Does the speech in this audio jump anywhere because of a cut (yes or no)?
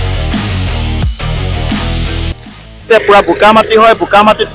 yes